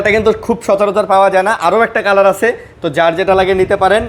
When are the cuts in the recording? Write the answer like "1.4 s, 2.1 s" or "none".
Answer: none